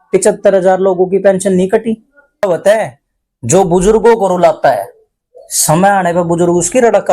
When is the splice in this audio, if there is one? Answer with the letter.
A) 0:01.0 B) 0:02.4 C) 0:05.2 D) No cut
B